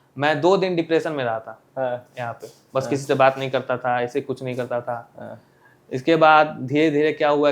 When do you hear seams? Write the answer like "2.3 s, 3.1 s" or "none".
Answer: none